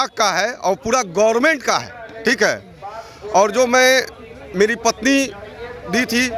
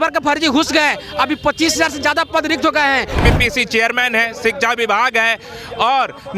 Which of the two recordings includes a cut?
second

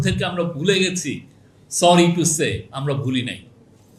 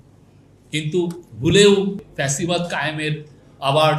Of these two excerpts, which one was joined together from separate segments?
second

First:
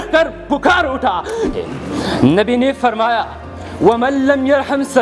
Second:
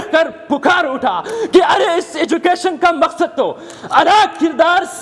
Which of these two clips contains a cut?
first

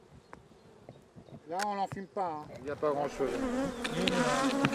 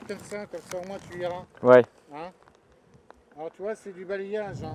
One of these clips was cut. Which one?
first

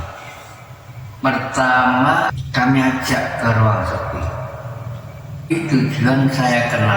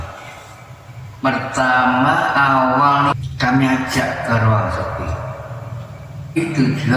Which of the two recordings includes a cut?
first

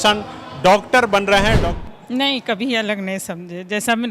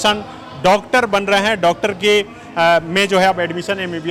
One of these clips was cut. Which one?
first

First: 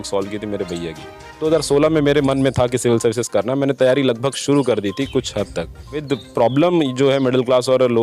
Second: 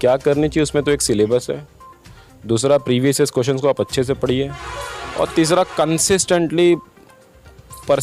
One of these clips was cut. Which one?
first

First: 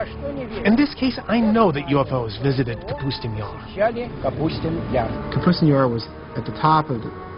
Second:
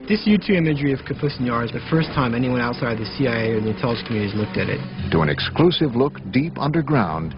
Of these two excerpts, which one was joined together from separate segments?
first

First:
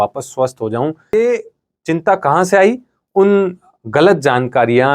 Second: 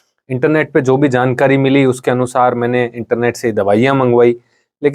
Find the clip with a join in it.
first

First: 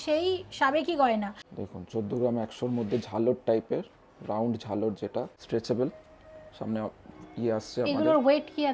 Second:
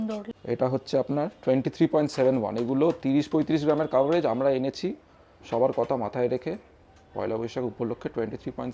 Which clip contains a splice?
first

